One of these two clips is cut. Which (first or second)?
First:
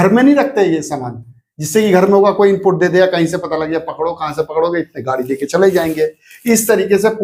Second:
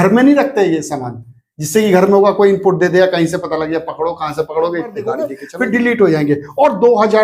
second